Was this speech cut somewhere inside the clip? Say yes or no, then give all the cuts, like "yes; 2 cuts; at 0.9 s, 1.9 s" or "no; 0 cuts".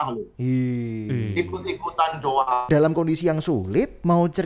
yes; 1 cut; at 2.7 s